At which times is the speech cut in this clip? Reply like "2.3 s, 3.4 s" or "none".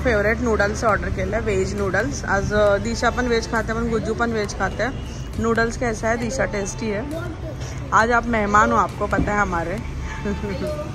none